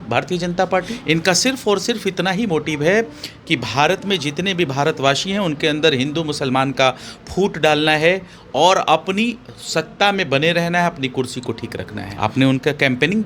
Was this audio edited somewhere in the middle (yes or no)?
yes